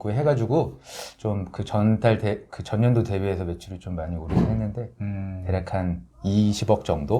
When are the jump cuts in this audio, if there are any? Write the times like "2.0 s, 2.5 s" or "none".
6.1 s